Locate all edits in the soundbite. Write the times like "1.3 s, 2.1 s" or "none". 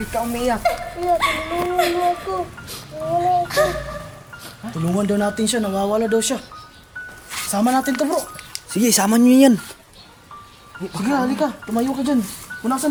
none